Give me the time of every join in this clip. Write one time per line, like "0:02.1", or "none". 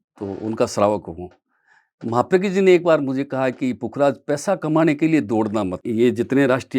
0:05.8